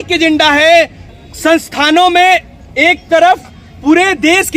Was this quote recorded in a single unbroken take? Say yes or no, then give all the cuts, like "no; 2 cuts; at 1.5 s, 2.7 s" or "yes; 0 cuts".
no; 1 cut; at 1.0 s